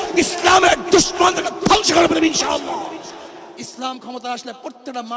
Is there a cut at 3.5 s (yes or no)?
yes